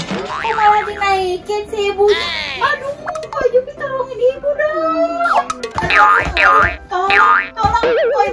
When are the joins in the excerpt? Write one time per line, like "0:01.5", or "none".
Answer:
none

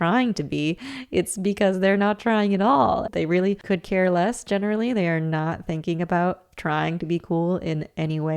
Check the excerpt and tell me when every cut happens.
0:03.1

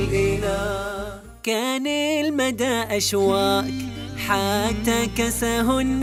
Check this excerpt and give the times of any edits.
none

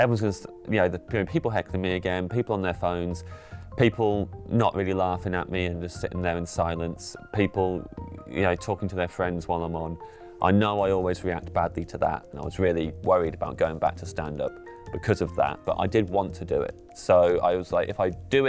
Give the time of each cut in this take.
0:12.3
0:15.6

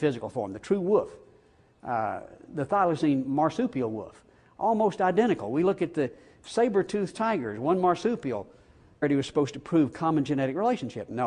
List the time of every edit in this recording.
none

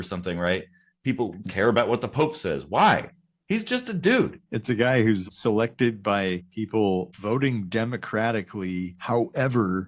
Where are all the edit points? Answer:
0:04.5
0:05.2
0:06.5
0:07.1
0:09.0

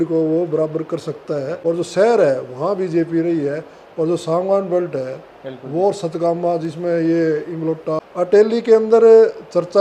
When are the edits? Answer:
0:01.5
0:08.0

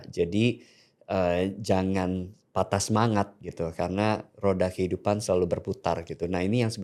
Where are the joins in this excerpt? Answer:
none

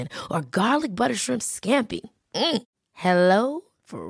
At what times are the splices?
none

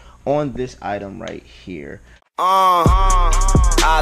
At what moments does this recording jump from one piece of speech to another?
0:02.1

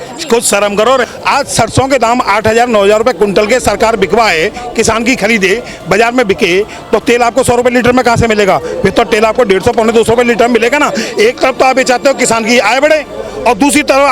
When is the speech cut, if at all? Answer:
0:01.1

